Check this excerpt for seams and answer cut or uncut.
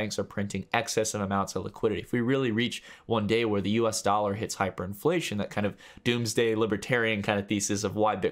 uncut